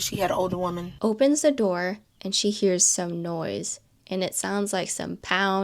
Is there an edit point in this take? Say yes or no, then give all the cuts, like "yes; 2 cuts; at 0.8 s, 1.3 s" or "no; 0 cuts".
yes; 1 cut; at 0.9 s